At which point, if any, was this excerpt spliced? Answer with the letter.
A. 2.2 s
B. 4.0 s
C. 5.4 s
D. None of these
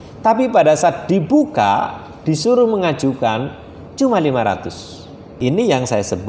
C